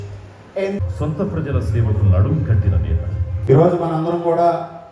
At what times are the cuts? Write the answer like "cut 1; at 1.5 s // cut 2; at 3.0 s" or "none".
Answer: cut 1; at 0.8 s // cut 2; at 3.4 s